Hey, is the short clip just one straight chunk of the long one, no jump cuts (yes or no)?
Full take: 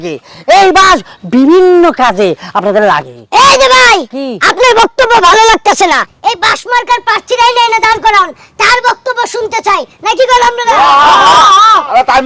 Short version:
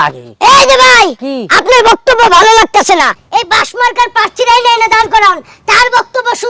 yes